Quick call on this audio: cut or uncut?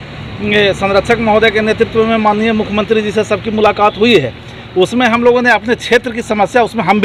uncut